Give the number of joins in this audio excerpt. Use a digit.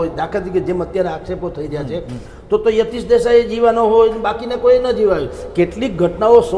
0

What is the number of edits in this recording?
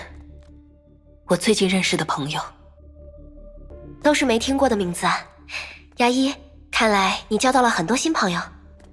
1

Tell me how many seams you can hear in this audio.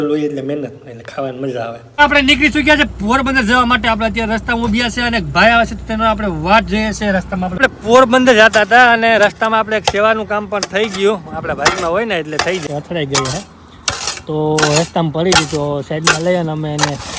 3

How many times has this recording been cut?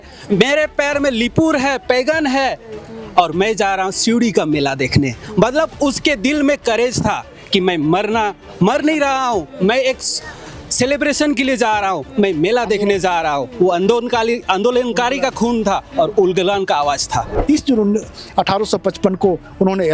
1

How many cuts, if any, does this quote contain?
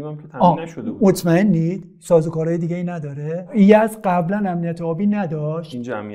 1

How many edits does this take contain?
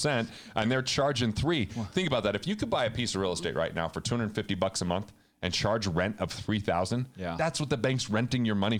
0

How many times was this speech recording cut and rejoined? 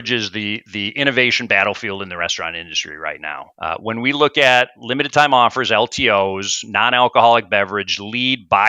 1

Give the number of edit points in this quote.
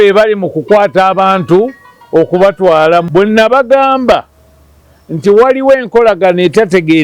1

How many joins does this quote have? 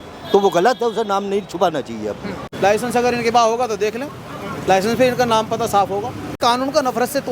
2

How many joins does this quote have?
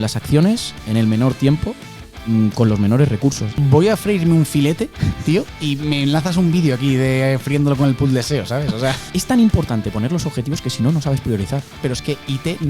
3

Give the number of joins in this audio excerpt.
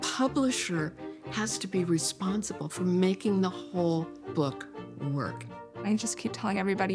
1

